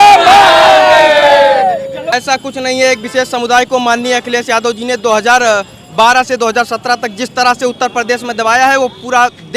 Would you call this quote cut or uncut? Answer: cut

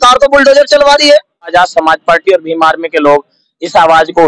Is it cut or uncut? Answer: cut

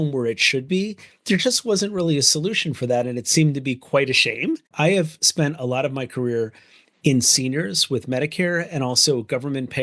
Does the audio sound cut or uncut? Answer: cut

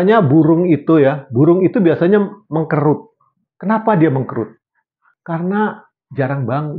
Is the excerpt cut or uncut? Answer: uncut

